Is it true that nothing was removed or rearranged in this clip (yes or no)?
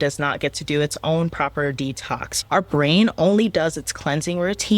no